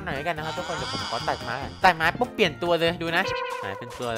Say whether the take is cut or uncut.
uncut